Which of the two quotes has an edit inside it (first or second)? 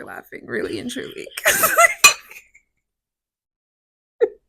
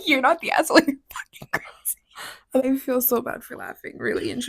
second